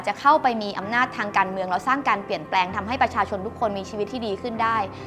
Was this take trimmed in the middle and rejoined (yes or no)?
no